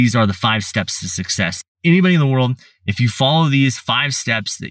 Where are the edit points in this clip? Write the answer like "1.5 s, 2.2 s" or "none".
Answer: 1.5 s